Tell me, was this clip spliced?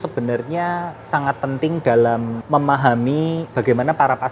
yes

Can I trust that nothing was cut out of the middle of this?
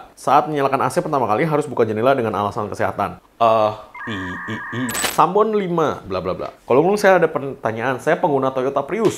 no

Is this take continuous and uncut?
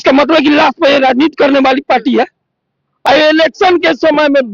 no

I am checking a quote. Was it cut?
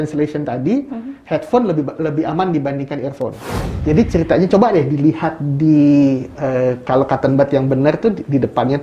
yes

